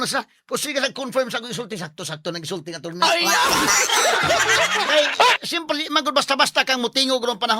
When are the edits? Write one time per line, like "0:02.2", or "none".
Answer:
0:04.8